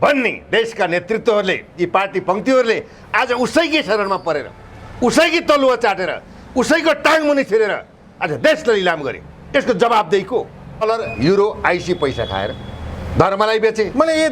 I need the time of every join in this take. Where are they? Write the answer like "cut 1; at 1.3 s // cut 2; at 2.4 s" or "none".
cut 1; at 10.8 s